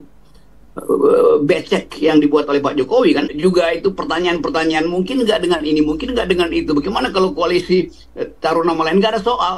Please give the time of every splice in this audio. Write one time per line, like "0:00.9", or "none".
0:03.3